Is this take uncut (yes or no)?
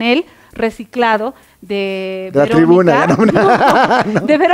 yes